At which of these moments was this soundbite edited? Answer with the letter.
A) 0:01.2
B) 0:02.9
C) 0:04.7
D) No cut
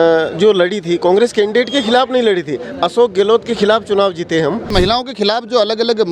C